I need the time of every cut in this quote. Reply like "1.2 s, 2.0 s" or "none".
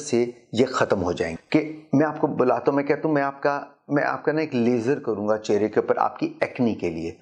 1.3 s